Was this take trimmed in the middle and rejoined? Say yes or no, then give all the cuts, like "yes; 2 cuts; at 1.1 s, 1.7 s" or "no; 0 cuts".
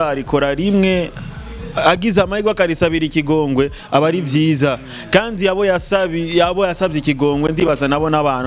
no; 0 cuts